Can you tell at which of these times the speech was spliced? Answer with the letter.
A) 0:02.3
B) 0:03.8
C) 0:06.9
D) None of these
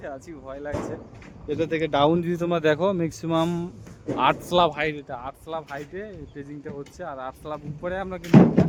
D